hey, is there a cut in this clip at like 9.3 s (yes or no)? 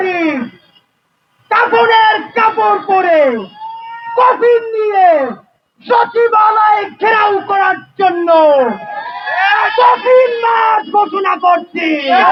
no